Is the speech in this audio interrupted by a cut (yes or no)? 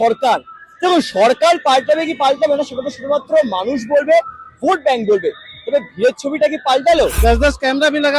yes